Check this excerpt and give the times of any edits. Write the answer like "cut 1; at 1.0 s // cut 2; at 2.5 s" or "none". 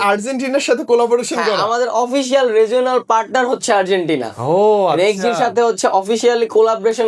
none